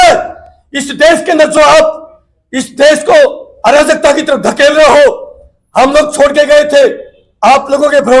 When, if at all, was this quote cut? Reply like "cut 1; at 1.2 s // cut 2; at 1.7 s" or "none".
none